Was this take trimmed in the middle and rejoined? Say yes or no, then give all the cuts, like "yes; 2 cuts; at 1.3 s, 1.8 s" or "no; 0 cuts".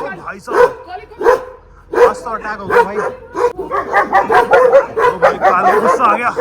yes; 1 cut; at 3.6 s